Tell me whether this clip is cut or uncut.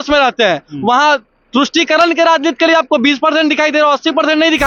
uncut